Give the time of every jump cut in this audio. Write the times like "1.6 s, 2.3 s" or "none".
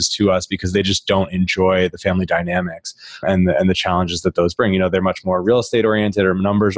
none